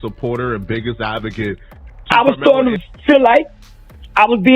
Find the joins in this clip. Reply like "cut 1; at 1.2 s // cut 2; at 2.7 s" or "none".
cut 1; at 1.9 s